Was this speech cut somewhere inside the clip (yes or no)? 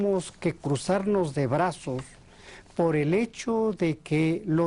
yes